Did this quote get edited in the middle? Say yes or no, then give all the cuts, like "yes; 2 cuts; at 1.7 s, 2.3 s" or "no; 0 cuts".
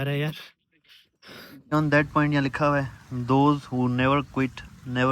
yes; 1 cut; at 1.6 s